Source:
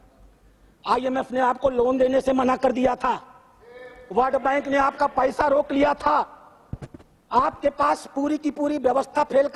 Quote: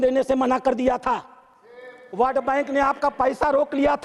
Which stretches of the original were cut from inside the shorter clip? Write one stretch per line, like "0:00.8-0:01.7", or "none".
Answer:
none

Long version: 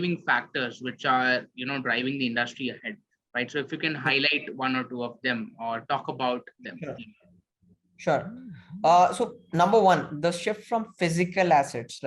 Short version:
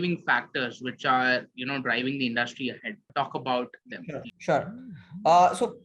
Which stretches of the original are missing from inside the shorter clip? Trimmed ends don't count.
0:03.1-0:05.8
0:07.1-0:07.9

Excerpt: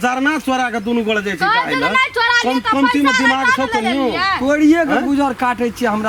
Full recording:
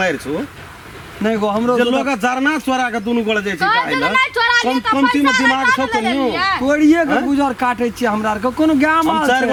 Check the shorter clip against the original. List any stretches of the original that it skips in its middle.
none

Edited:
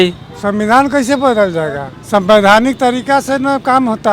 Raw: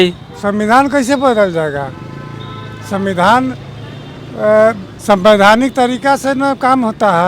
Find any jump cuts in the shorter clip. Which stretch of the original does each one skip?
0:01.9-0:04.9

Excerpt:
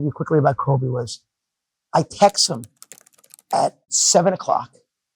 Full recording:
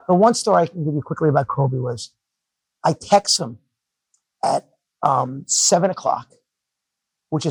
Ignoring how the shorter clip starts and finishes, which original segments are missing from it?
0:04.8-0:05.5

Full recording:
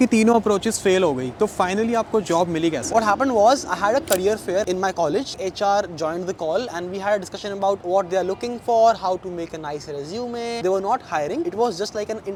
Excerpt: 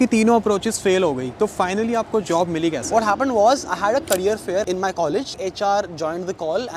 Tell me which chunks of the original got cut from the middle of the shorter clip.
none

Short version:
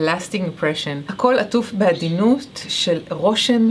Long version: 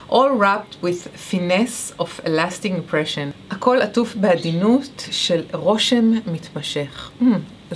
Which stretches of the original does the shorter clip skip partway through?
0:03.3-0:03.5

